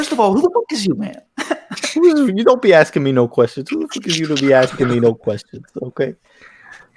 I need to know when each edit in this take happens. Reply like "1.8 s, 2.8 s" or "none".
none